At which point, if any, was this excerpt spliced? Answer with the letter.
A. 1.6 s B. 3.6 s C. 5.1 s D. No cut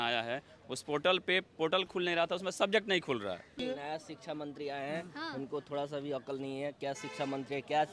B